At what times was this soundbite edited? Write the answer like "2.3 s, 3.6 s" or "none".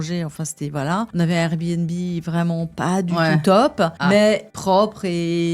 1.1 s, 4.0 s, 4.5 s